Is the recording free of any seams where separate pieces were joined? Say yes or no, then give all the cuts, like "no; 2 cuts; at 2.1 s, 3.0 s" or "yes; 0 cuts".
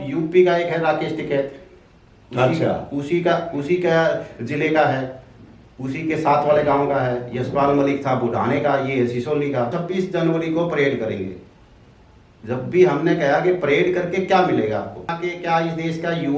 no; 2 cuts; at 9.8 s, 15.1 s